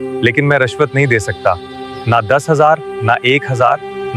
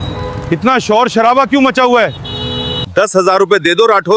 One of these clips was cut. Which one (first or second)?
second